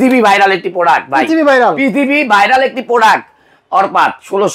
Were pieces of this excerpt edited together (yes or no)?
no